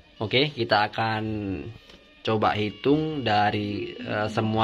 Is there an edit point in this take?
no; 0 cuts

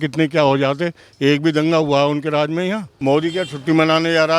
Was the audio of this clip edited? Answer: yes; 1 cut; at 2.9 s

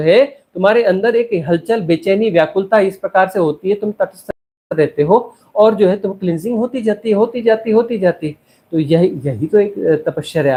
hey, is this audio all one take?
yes; 0 cuts

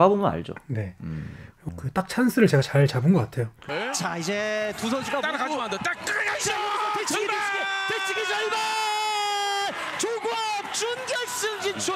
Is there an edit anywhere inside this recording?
yes; 1 cut; at 1.5 s

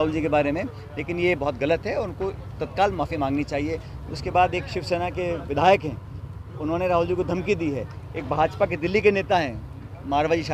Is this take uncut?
yes; 0 cuts

